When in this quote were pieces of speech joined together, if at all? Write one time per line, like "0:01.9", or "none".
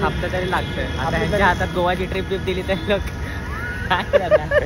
none